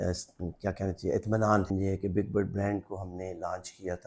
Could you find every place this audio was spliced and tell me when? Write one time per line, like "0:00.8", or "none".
0:01.7

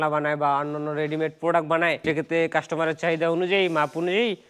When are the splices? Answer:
0:02.0

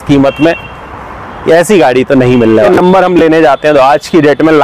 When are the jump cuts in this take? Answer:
0:02.7

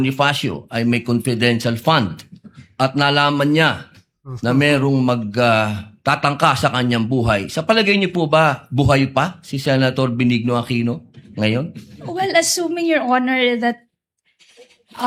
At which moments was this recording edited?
none

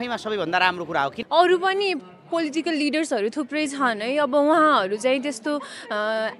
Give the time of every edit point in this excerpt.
0:01.2

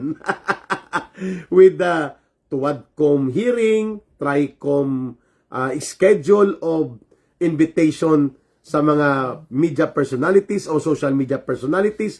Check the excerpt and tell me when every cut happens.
none

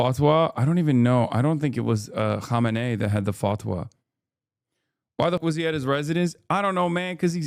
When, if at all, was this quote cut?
0:05.4

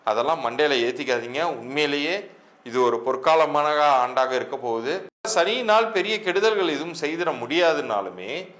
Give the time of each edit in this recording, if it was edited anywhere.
0:05.3

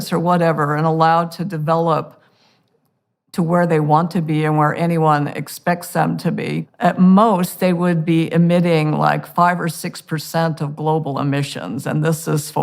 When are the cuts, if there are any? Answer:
0:06.7

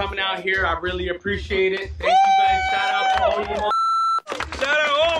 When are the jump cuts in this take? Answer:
none

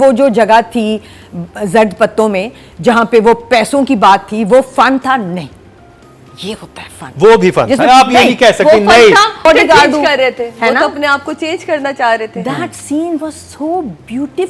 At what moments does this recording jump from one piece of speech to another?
0:09.5

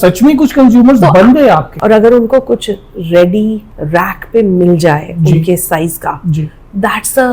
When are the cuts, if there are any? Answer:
0:01.7

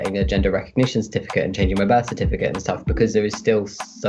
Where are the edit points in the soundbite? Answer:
none

